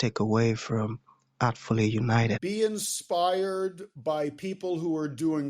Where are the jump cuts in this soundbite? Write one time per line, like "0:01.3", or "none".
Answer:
0:02.4